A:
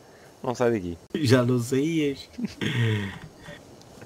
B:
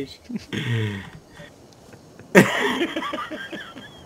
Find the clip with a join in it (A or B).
A